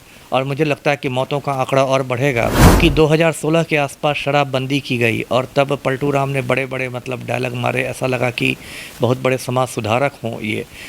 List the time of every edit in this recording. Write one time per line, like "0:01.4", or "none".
0:02.8